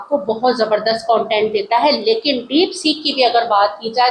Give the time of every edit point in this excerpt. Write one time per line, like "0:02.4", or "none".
none